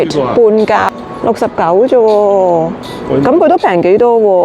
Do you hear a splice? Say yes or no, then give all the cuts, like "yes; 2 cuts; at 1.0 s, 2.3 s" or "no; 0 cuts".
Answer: yes; 1 cut; at 0.9 s